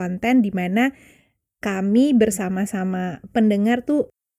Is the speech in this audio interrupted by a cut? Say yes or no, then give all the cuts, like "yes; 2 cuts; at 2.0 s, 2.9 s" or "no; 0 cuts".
no; 0 cuts